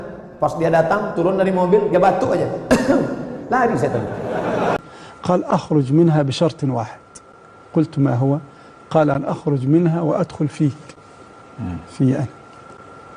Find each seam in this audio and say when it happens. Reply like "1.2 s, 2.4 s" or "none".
4.8 s